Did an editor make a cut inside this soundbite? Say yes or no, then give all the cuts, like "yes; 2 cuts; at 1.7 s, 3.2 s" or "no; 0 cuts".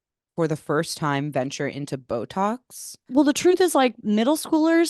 yes; 1 cut; at 3.0 s